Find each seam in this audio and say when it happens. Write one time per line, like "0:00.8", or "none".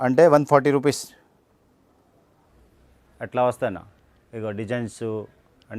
0:02.5